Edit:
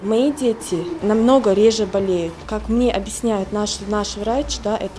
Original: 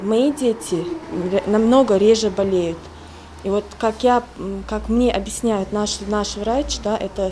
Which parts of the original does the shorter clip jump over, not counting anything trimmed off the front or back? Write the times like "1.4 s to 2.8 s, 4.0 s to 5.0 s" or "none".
1.0 s to 1.4 s, 2.9 s to 4.7 s